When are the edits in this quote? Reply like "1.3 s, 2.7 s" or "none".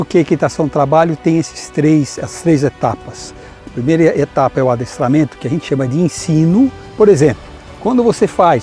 6.8 s